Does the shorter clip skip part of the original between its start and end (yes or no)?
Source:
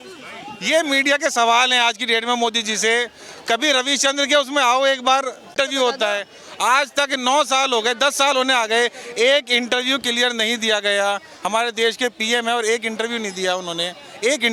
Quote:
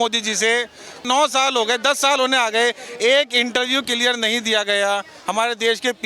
yes